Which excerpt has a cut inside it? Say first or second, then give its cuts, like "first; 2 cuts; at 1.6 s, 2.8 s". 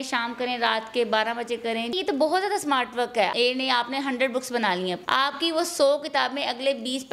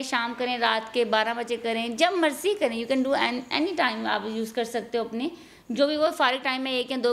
first; 3 cuts; at 1.9 s, 3.3 s, 5.0 s